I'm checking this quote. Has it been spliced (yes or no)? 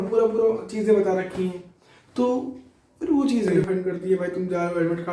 yes